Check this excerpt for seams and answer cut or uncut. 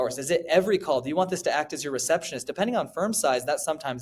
uncut